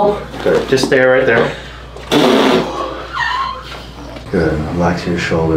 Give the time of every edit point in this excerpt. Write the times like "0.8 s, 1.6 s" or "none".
4.2 s